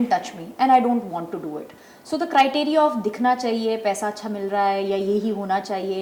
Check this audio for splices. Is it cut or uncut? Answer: uncut